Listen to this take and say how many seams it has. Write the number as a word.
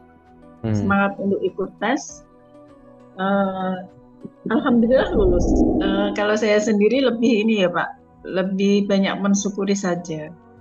one